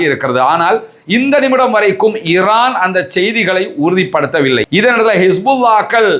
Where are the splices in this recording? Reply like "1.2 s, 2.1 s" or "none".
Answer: 4.7 s